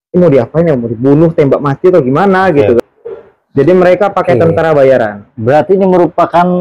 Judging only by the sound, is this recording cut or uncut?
cut